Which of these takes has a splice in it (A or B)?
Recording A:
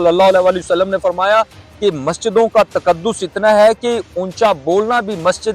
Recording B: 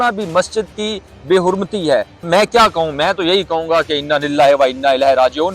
B